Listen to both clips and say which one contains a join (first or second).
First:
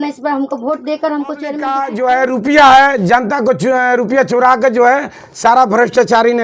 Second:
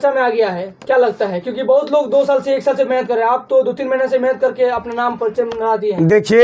first